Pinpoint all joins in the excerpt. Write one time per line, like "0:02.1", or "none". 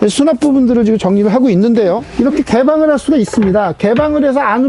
0:02.1